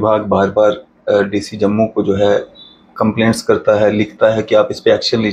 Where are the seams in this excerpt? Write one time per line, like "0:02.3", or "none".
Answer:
none